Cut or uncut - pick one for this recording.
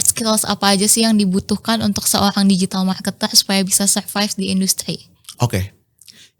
uncut